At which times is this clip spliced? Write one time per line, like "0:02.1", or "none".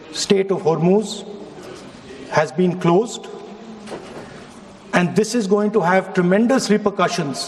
none

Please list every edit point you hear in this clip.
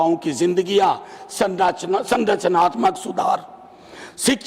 none

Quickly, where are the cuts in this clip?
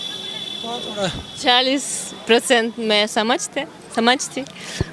none

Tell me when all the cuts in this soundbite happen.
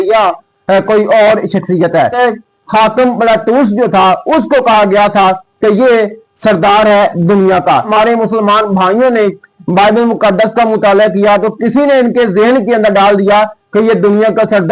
0:02.1
0:07.9

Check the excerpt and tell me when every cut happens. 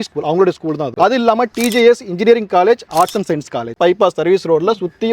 0:00.9
0:03.8

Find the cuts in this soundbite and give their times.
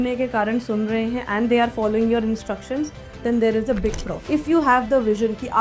0:04.2

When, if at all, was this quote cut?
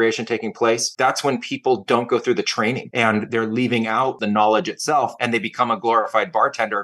0:00.9
0:02.9
0:04.2
0:05.2

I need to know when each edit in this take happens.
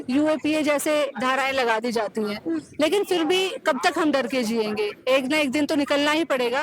none

